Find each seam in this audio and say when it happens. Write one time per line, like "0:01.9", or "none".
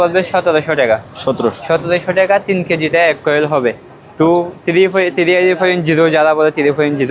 none